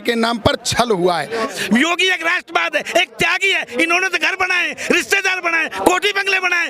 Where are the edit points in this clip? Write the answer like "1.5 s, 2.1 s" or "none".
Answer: 1.5 s